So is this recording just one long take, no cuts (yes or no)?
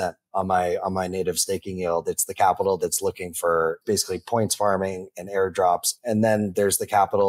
no